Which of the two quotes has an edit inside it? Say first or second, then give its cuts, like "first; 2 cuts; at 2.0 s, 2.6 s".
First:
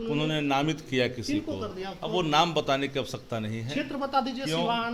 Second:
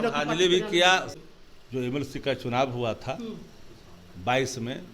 second; 1 cut; at 1.1 s